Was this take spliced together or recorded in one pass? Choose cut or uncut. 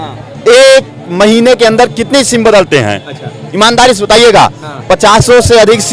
uncut